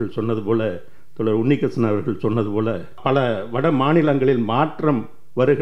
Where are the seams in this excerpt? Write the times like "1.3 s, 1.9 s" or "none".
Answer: 3.0 s